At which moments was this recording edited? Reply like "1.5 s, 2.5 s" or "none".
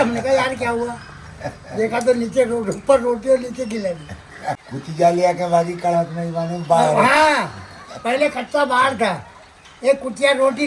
4.6 s